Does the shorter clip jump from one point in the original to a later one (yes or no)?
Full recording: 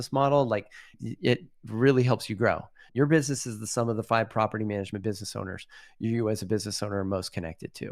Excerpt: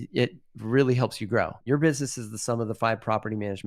yes